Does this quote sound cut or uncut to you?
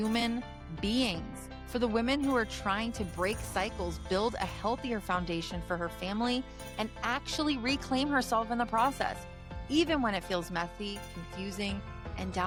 uncut